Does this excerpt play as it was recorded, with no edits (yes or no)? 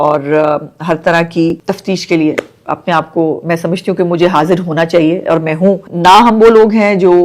no